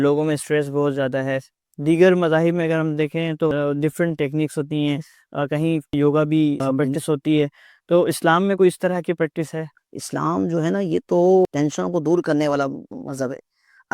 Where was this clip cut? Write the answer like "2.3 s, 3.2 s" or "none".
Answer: 3.5 s, 5.9 s, 6.6 s, 9.7 s, 11.5 s